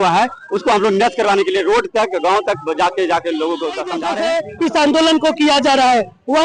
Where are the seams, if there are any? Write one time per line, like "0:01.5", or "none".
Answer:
0:04.0